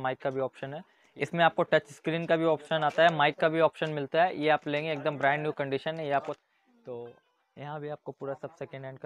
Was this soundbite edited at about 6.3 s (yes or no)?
yes